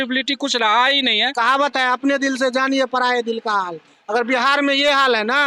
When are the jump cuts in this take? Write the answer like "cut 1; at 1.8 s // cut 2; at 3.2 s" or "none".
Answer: cut 1; at 1.3 s

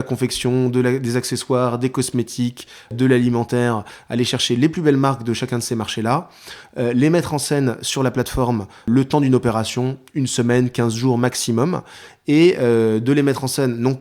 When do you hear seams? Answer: cut 1; at 2.9 s // cut 2; at 8.9 s

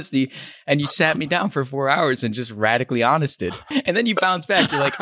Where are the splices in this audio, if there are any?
cut 1; at 3.7 s

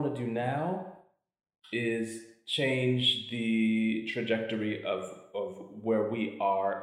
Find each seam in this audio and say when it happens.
none

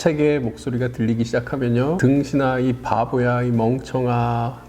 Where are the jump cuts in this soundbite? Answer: cut 1; at 2.0 s

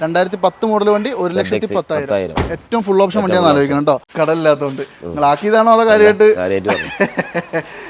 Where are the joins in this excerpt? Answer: cut 1; at 4.1 s

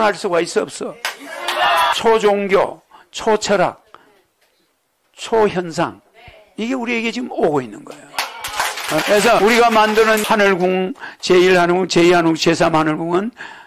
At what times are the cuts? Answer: cut 1; at 1.9 s // cut 2; at 9.4 s // cut 3; at 10.2 s

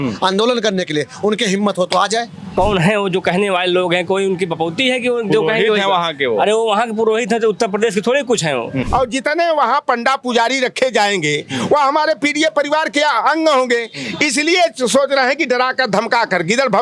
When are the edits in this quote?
cut 1; at 2.5 s // cut 2; at 8.8 s

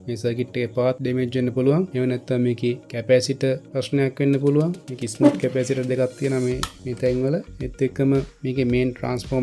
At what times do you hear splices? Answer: cut 1; at 1.0 s // cut 2; at 1.9 s // cut 3; at 2.9 s // cut 4; at 3.7 s

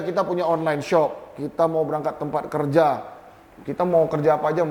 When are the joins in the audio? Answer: none

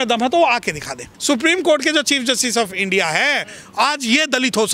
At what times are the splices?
cut 1; at 1.1 s

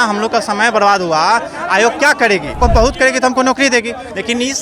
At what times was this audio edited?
cut 1; at 2.6 s

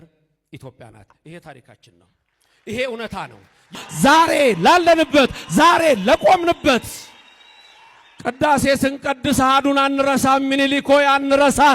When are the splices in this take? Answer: cut 1; at 3.8 s

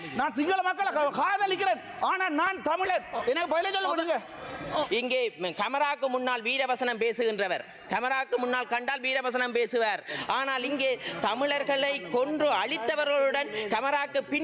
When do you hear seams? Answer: cut 1; at 4.9 s

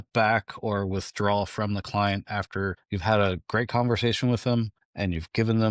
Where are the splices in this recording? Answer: none

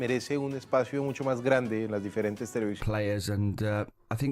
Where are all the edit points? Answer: cut 1; at 2.8 s

